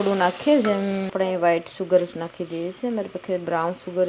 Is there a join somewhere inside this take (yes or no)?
yes